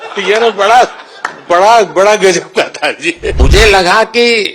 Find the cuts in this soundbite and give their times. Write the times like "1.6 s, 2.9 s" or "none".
3.4 s

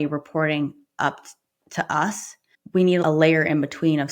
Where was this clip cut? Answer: 3.0 s

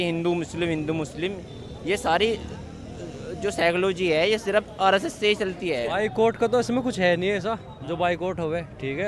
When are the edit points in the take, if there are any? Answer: 5.9 s

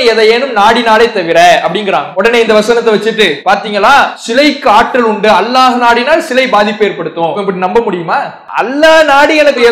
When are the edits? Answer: 2.1 s, 3.4 s, 4.2 s, 7.4 s, 8.4 s

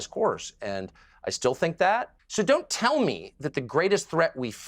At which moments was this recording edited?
2.2 s

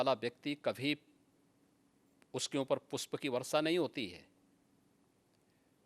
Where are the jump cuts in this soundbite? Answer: none

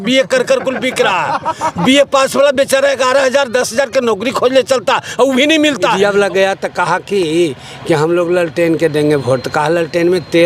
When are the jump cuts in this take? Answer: 5.9 s

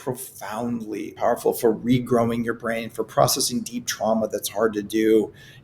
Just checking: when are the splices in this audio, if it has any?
1.2 s

